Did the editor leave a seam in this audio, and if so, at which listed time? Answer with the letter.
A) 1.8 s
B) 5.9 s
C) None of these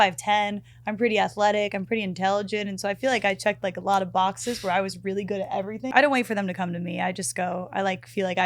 B